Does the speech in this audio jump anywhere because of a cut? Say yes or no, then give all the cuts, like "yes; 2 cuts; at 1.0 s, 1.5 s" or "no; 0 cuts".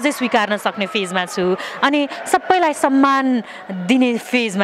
no; 0 cuts